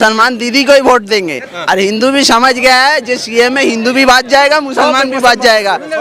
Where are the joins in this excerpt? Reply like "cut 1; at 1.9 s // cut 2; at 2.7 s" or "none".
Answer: none